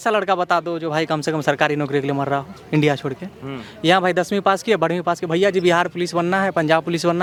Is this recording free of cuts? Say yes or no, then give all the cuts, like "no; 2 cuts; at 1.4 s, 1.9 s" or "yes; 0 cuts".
yes; 0 cuts